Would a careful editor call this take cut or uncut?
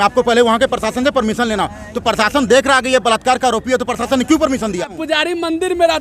cut